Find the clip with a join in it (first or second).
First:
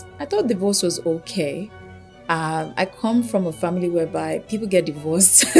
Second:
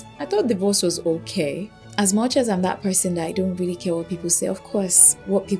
second